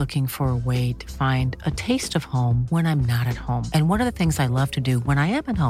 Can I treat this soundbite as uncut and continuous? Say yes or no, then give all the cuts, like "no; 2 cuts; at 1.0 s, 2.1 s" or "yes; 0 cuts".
yes; 0 cuts